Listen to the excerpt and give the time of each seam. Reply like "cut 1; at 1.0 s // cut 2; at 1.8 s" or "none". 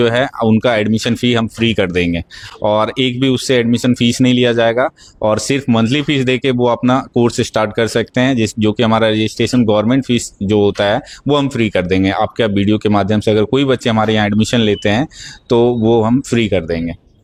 none